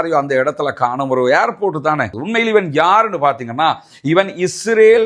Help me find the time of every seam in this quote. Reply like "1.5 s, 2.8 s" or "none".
2.2 s